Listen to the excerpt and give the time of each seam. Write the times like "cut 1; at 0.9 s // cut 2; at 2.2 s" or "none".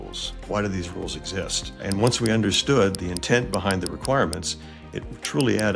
cut 1; at 1.8 s